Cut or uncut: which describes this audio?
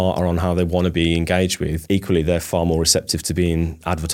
cut